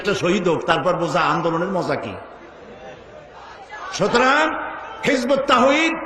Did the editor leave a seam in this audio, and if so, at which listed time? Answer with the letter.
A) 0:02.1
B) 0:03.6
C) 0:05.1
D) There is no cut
B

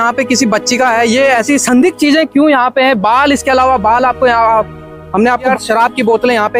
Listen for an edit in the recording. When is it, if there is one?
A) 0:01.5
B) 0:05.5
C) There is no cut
B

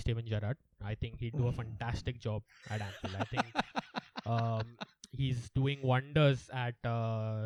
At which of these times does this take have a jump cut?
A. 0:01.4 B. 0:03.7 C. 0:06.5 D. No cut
D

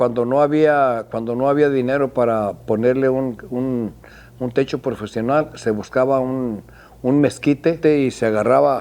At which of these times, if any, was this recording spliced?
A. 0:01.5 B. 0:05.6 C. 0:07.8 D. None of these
C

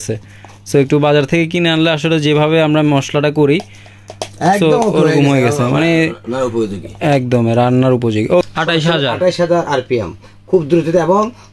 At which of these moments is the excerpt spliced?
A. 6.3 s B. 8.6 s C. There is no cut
B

